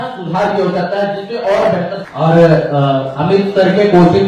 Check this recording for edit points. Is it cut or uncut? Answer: cut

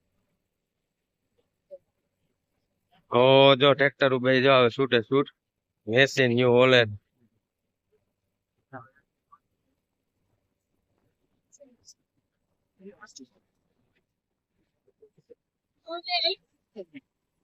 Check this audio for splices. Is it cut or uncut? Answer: uncut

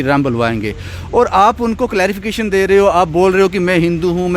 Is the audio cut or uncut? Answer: uncut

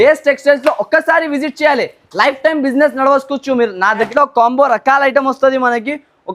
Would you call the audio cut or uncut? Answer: cut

